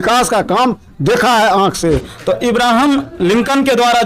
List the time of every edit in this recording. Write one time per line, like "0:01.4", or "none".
0:02.1